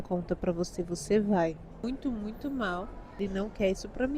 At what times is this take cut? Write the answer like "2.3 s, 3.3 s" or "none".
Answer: 1.8 s, 3.2 s